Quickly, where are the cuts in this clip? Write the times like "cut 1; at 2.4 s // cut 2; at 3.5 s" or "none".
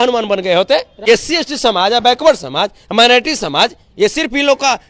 cut 1; at 1.0 s